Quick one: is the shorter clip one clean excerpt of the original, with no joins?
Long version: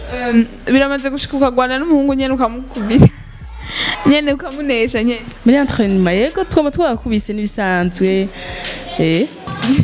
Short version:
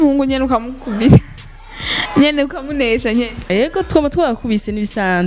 no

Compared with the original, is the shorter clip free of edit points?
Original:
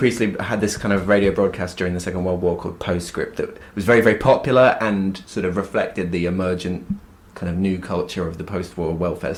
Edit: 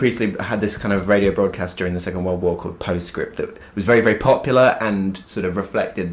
yes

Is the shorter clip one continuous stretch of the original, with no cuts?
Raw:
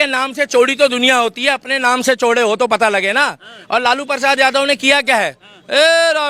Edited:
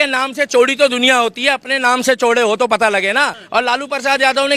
no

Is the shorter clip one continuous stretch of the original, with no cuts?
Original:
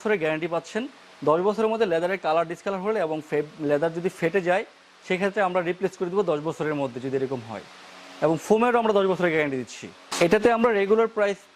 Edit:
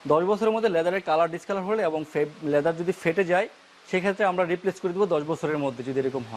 yes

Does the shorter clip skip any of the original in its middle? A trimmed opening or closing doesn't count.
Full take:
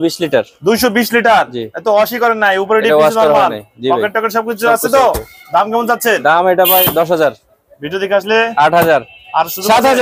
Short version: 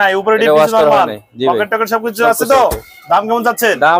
no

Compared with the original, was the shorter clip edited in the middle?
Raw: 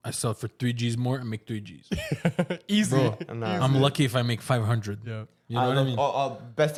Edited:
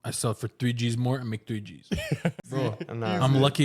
yes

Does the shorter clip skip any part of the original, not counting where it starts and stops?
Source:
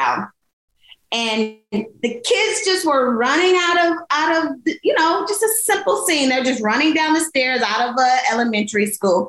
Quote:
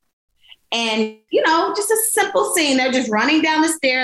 yes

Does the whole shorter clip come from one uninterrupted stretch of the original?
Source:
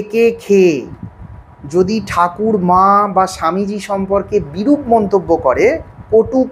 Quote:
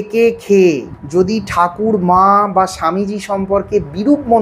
no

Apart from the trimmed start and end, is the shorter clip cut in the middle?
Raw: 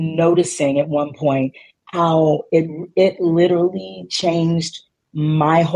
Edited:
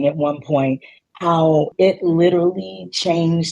yes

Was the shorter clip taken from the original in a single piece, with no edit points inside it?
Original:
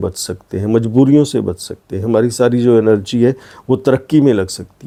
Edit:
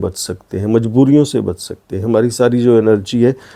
yes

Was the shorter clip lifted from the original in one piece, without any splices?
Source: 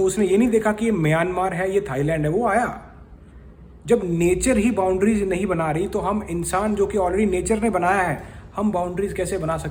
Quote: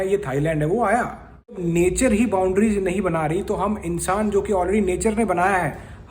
no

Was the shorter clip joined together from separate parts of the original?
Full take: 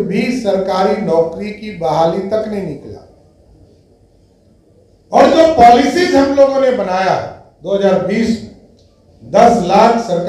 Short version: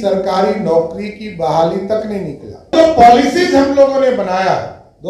yes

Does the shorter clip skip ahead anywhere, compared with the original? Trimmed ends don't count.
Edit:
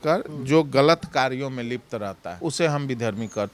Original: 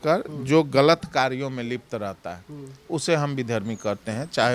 yes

